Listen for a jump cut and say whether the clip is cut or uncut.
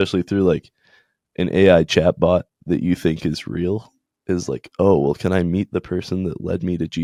uncut